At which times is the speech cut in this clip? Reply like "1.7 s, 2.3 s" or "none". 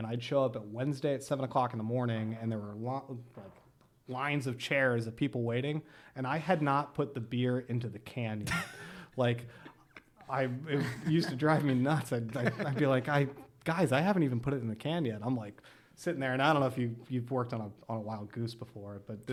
none